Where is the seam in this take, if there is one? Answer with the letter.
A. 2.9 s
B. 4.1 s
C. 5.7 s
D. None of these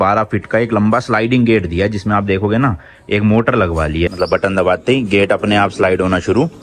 B